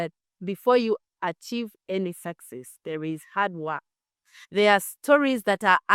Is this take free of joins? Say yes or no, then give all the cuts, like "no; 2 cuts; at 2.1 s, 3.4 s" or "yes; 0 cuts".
yes; 0 cuts